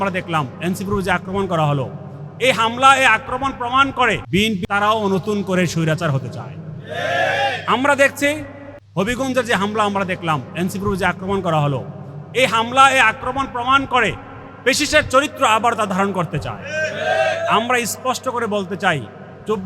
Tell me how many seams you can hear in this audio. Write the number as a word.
one